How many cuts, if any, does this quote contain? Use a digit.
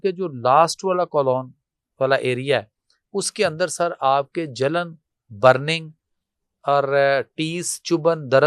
0